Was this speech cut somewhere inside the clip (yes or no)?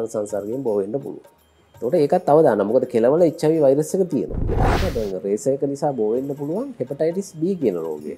yes